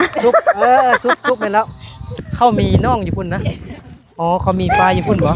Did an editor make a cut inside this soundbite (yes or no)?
yes